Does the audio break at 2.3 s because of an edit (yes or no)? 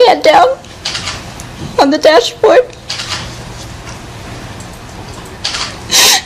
no